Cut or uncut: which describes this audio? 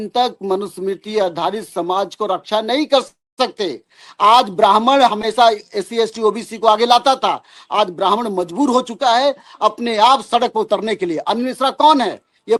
uncut